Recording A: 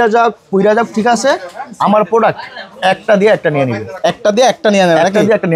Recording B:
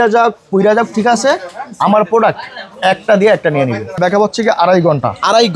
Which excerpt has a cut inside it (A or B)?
B